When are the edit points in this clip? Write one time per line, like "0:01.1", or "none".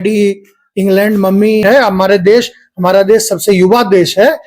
0:01.6